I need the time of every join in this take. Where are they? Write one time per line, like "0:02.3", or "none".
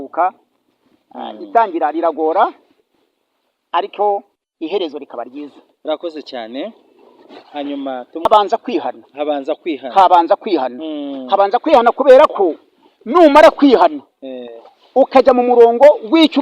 0:08.3

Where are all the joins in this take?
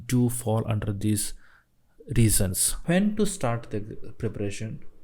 0:02.7

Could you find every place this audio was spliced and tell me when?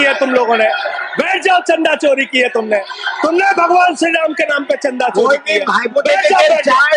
none

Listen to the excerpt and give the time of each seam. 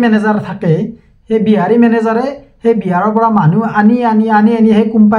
none

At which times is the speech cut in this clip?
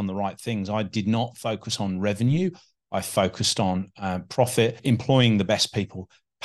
0:04.8

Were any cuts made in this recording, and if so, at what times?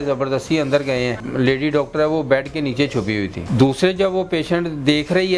0:01.2
0:03.4

